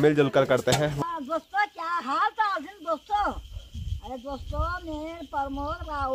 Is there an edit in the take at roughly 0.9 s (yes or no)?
yes